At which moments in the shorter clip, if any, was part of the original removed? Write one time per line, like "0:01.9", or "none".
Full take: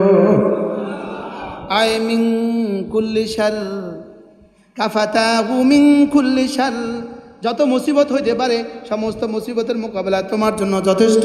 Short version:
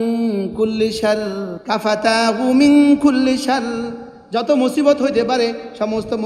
0:01.5